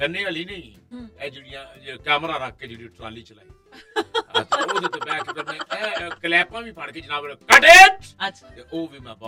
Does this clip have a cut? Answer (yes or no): no